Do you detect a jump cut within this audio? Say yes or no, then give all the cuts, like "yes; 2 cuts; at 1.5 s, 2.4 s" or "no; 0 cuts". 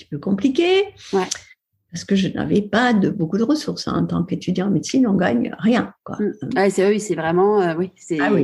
no; 0 cuts